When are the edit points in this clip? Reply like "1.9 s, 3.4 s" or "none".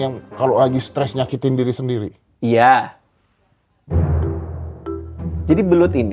none